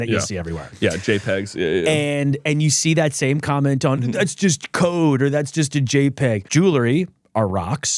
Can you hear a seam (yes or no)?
yes